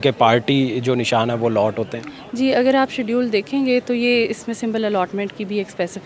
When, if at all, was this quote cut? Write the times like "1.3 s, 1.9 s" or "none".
none